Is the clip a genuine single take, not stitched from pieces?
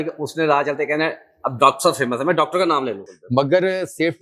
no; 1 cut; at 3.1 s

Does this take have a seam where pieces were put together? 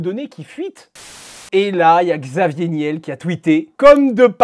yes; 1 cut; at 1.2 s

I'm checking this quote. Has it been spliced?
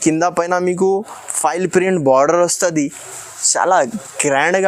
no; 0 cuts

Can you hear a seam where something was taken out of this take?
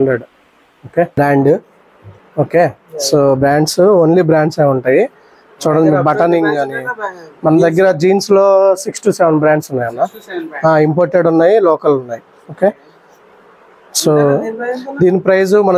yes; 1 cut; at 1.2 s

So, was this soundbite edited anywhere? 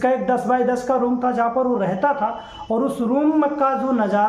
no; 0 cuts

